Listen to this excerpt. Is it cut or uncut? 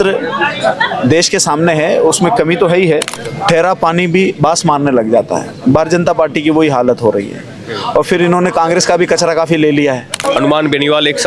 cut